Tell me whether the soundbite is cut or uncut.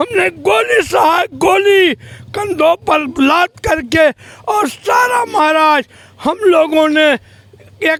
uncut